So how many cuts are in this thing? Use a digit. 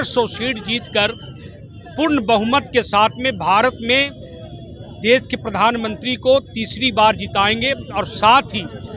0